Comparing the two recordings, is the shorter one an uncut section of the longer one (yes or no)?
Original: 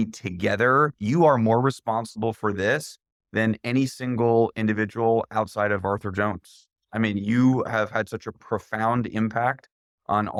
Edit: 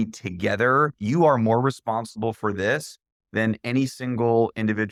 yes